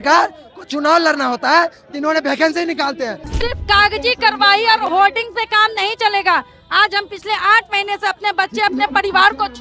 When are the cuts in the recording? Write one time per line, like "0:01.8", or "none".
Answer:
0:03.2